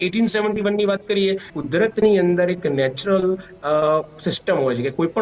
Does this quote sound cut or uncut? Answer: cut